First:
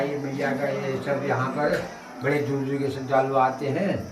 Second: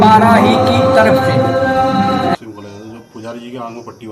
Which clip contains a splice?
second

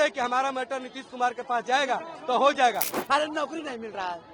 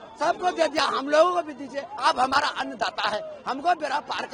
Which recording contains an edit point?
first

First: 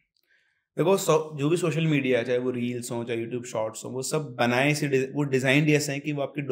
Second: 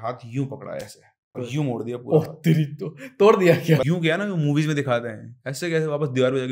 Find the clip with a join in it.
second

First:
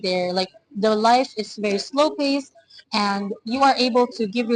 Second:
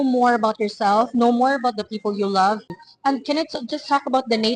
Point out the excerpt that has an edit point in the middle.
second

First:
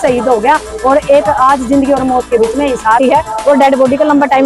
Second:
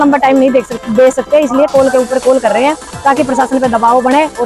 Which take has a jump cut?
first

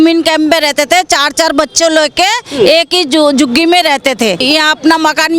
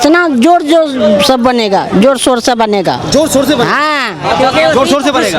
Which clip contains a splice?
first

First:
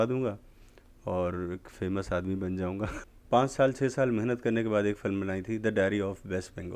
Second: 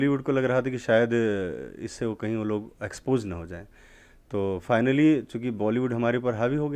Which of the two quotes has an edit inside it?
first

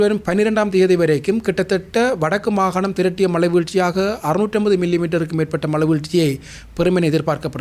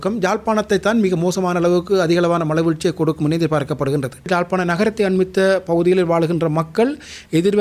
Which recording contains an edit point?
second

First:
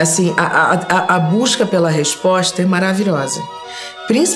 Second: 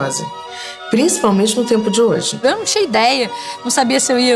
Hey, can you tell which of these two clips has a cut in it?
second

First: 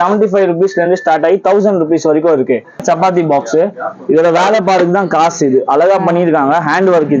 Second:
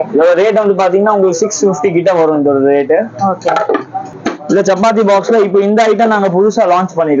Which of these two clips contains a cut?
first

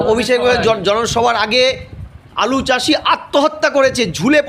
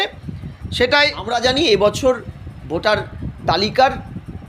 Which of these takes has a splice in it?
second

